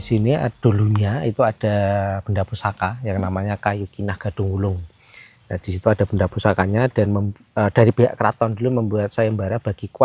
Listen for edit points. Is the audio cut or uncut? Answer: uncut